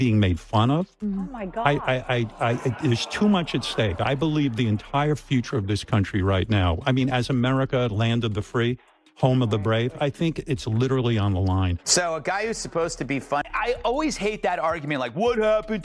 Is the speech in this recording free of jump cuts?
no; 1 cut; at 13.4 s

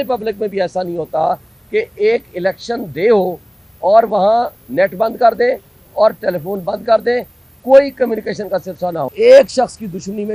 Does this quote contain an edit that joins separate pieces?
yes; 1 cut; at 9.1 s

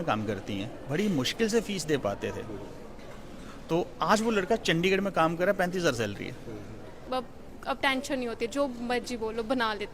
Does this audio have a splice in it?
yes; 1 cut; at 7.0 s

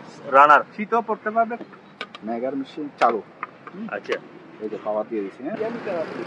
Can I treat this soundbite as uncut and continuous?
no; 2 cuts; at 1.7 s, 5.6 s

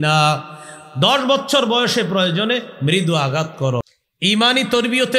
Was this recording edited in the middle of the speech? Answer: yes; 1 cut; at 3.9 s

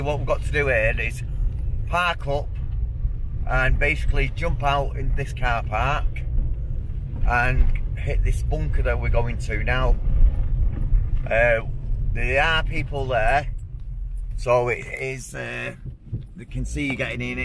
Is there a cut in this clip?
no; 0 cuts

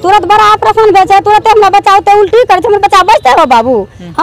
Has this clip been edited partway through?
no; 0 cuts

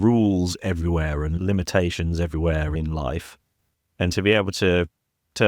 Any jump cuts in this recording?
yes; 2 cuts; at 1.3 s, 2.7 s

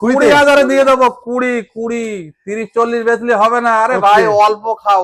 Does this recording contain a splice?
no; 0 cuts

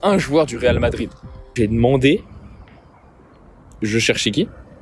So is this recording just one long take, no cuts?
no; 1 cut; at 1.5 s

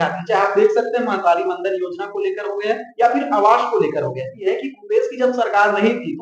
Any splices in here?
yes; 1 cut; at 4.4 s

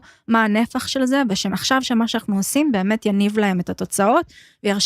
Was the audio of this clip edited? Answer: yes; 1 cut; at 1.5 s

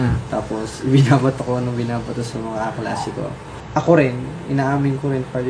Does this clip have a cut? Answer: yes; 1 cut; at 3.5 s

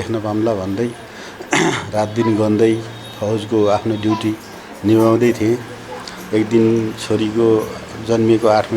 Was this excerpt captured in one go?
yes; 0 cuts

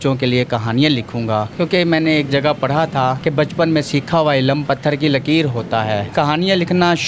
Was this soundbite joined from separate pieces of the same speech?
yes; 3 cuts; at 1.5 s, 3.2 s, 6.1 s

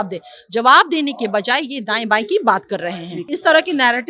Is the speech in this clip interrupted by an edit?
yes; 1 cut; at 3.2 s

